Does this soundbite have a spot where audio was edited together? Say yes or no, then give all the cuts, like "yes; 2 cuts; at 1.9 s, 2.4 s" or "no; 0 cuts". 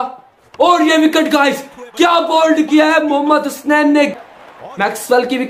yes; 1 cut; at 4.1 s